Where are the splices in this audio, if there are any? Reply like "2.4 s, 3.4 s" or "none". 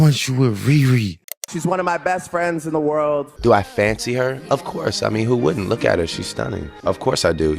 1.4 s, 3.3 s